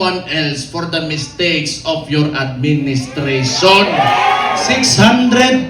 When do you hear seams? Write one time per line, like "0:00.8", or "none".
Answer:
0:04.6